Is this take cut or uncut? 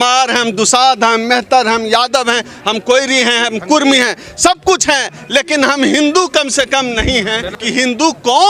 uncut